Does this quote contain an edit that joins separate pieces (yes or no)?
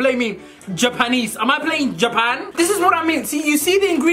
yes